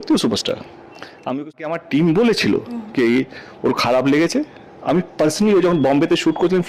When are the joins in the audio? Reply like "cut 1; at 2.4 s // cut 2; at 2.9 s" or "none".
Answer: cut 1; at 1.6 s